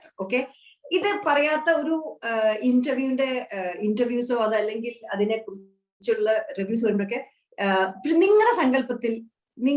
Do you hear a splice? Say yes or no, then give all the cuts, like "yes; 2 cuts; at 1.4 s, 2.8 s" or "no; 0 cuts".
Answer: no; 0 cuts